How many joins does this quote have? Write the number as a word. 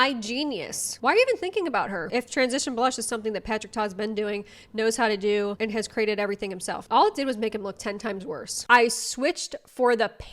one